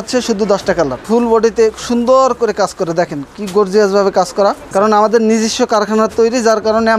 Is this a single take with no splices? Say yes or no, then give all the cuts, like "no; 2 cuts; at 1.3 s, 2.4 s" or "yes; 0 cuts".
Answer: no; 2 cuts; at 1.0 s, 4.6 s